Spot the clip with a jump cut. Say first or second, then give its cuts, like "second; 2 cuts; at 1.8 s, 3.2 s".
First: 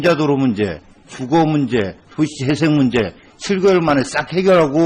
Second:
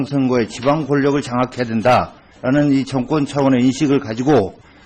first; 1 cut; at 1.9 s